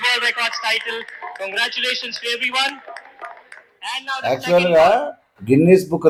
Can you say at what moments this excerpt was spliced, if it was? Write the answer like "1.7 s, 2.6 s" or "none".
none

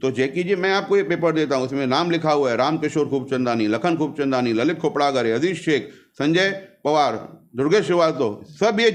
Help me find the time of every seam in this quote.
none

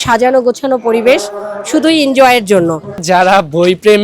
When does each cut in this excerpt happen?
3.0 s

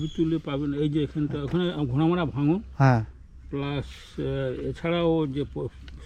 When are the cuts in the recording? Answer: none

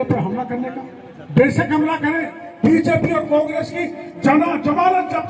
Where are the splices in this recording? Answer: 2.4 s

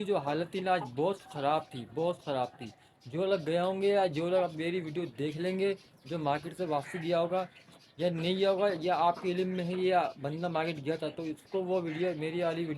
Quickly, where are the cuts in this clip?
none

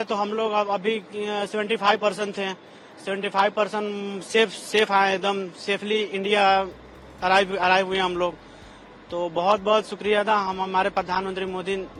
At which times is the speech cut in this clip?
none

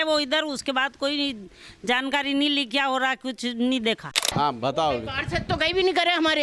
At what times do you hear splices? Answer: 4.2 s

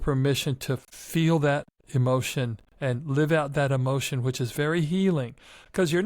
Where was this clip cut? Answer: 0.9 s, 1.8 s, 2.6 s

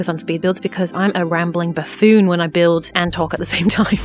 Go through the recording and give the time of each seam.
none

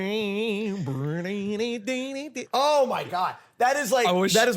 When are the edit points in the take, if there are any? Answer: 2.3 s

